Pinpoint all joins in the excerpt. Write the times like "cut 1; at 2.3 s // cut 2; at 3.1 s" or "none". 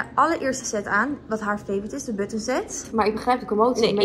cut 1; at 2.8 s